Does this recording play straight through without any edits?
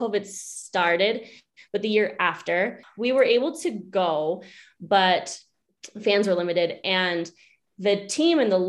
no; 1 cut; at 2.8 s

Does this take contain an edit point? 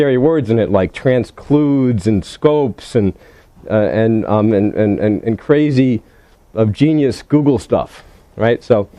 yes; 1 cut; at 3.9 s

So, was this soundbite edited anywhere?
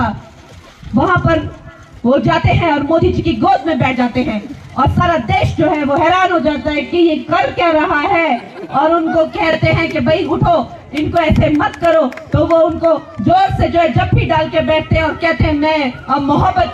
no; 0 cuts

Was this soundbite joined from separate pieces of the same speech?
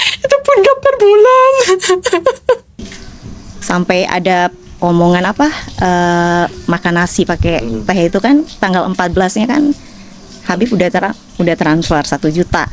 yes; 1 cut; at 2.3 s

